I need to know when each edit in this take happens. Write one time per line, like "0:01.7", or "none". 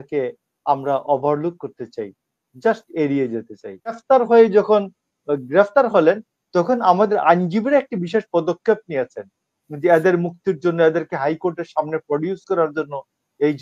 0:04.0